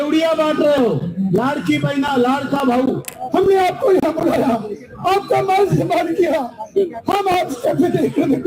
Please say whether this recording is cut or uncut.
cut